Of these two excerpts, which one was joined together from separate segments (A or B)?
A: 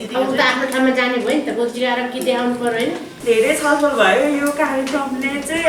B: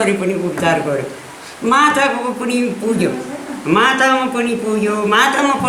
A